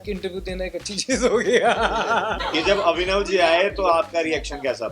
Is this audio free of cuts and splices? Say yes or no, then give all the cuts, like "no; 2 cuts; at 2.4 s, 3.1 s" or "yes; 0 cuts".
no; 1 cut; at 2.3 s